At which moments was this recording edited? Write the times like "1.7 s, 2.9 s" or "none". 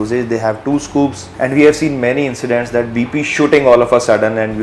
1.2 s